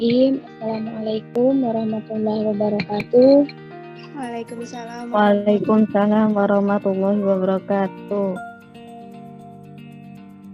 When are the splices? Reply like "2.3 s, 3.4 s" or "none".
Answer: 8.4 s